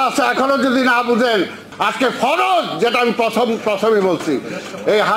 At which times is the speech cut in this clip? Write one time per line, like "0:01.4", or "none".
0:01.6